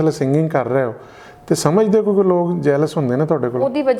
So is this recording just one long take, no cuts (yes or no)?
yes